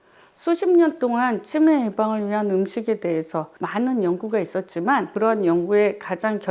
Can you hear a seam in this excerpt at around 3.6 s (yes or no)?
yes